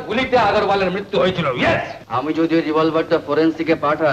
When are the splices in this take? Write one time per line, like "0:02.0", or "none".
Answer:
0:02.0